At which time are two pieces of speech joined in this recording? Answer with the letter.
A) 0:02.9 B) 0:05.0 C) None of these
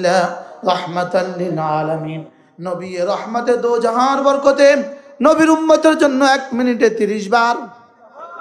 C